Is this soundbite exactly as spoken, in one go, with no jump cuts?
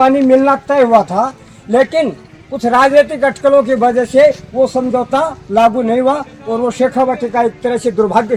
yes; 0 cuts

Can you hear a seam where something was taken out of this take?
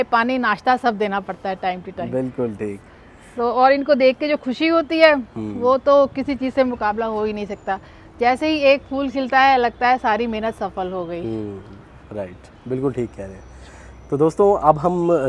no; 0 cuts

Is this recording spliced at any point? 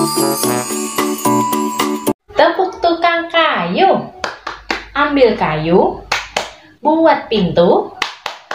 yes; 1 cut; at 1.9 s

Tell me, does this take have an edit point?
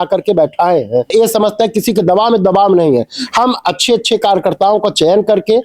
no; 0 cuts

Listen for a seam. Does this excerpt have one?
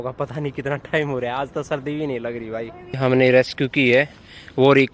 yes; 1 cut; at 3.0 s

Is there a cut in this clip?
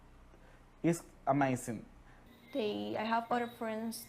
yes; 1 cut; at 2.2 s

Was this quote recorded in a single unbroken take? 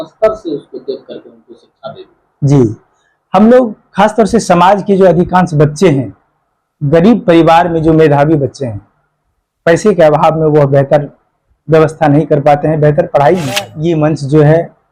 no; 1 cut; at 13.7 s

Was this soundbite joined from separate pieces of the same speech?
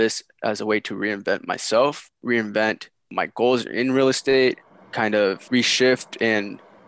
yes; 2 cuts; at 2.1 s, 5.4 s

